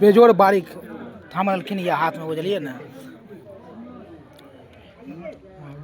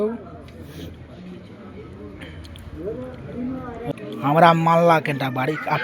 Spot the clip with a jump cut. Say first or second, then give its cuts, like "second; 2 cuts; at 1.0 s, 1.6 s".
second; 1 cut; at 3.9 s